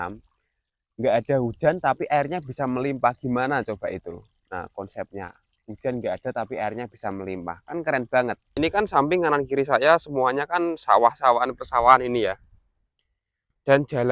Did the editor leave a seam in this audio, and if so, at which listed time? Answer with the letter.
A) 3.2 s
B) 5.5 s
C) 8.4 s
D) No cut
C